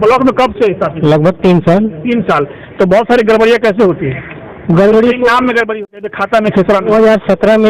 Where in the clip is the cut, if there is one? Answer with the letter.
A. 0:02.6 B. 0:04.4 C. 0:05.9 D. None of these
C